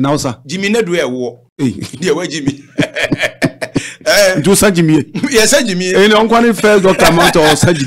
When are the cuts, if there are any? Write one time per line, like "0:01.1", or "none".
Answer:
0:01.4

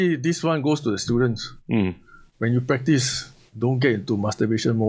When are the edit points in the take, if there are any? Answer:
none

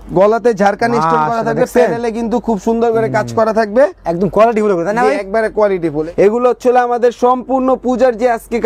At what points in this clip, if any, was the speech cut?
0:06.0

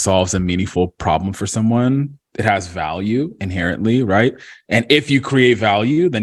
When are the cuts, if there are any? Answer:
none

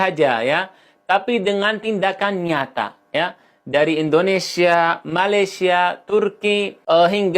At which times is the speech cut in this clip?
none

